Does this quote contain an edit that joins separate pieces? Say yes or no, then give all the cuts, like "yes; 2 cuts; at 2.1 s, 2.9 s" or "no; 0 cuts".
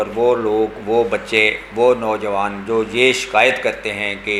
no; 0 cuts